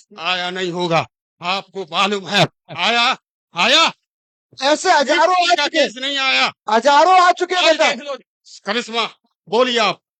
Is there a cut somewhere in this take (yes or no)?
no